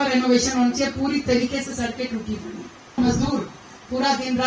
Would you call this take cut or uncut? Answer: cut